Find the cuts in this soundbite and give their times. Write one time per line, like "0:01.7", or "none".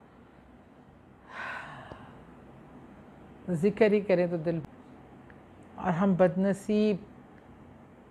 0:04.6